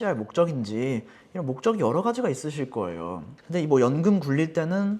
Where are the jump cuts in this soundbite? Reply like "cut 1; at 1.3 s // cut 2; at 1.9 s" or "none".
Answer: cut 1; at 3.3 s